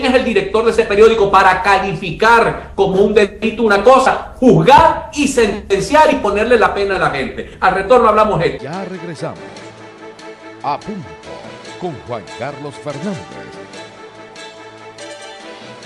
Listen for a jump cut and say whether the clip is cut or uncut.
cut